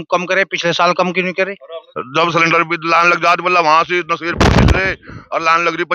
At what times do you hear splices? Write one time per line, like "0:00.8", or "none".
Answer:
0:01.9